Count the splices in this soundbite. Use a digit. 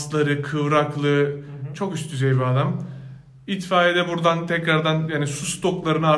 0